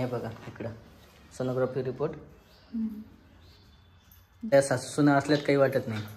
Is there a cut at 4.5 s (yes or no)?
yes